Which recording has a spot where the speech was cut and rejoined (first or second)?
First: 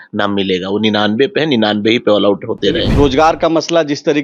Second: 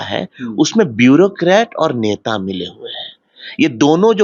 first